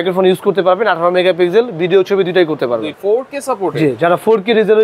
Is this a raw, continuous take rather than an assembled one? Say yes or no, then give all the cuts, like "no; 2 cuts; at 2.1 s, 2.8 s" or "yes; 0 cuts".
no; 1 cut; at 2.9 s